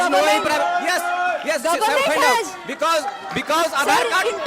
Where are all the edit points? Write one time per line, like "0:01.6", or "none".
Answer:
none